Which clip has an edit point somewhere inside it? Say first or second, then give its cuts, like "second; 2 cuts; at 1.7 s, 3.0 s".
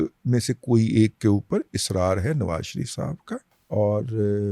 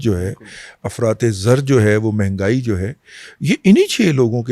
first; 1 cut; at 3.5 s